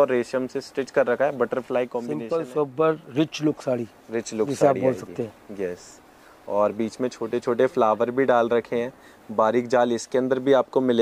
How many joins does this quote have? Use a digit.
1